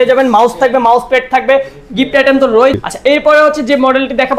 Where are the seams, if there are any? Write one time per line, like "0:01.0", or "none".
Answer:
0:02.8

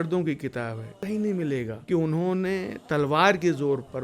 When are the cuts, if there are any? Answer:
0:01.0
0:01.8

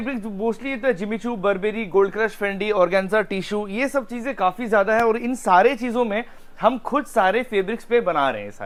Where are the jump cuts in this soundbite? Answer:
none

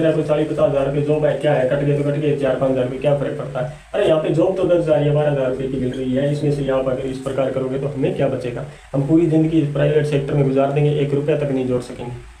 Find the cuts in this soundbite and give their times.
none

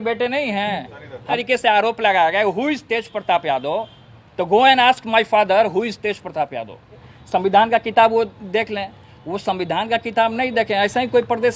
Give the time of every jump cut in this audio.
0:01.4
0:07.1

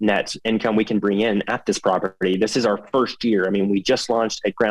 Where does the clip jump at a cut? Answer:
none

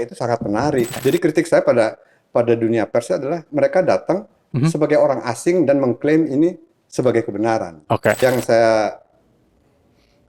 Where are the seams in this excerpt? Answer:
0:01.0
0:08.2

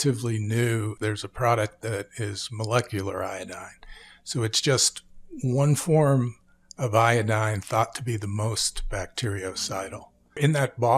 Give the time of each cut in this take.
0:00.9

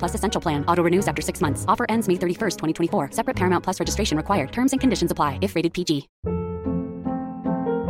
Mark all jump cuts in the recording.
0:06.2

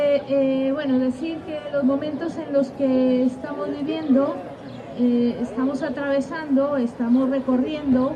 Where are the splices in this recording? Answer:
none

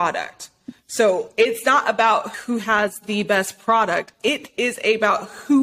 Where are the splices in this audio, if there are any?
0:02.3
0:04.3

